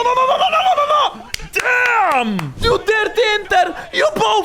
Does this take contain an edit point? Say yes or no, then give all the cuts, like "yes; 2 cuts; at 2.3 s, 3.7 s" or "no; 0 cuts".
yes; 1 cut; at 2.6 s